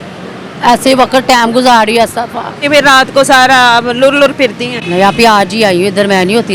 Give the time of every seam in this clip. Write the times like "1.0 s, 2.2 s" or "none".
2.6 s